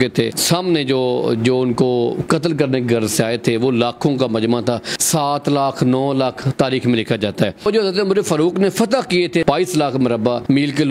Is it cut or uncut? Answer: uncut